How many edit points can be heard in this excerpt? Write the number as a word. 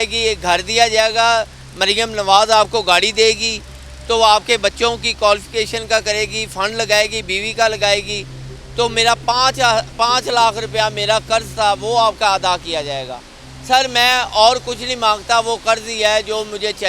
zero